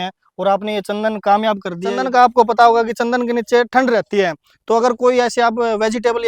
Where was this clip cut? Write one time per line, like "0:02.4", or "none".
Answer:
0:02.0